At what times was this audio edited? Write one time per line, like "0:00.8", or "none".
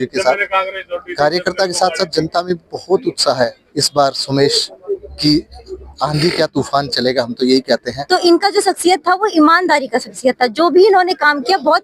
0:07.9